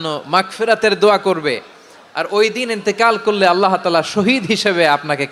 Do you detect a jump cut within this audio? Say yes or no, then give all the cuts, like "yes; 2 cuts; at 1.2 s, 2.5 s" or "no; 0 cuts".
no; 0 cuts